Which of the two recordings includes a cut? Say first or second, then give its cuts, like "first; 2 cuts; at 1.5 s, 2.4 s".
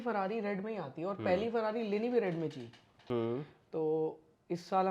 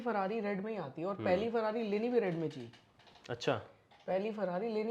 first; 1 cut; at 2.9 s